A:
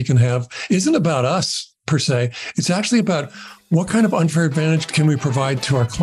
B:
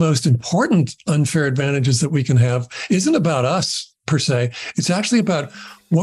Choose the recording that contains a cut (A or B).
A